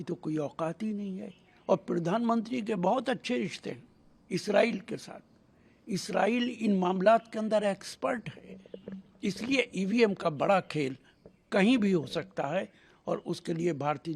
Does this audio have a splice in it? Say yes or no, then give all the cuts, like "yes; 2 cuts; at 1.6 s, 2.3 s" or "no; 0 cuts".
no; 0 cuts